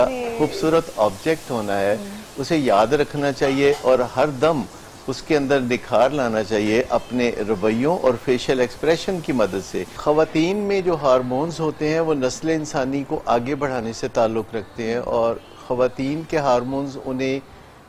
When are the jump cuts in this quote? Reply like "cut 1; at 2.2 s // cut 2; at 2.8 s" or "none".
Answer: cut 1; at 9.9 s